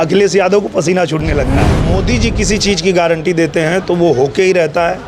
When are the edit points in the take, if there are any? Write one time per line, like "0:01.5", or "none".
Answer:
0:01.7